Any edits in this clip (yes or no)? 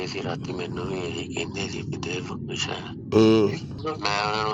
no